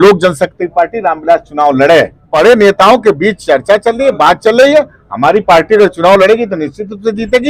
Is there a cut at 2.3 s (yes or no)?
yes